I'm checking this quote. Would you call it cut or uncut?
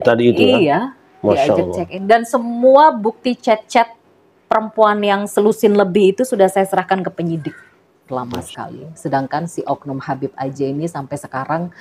cut